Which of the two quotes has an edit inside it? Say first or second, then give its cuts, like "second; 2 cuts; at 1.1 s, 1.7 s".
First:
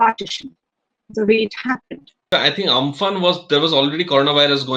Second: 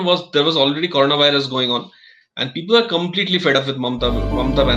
first; 1 cut; at 2.2 s